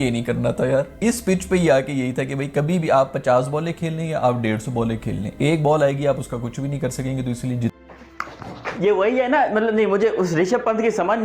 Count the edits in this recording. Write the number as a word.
one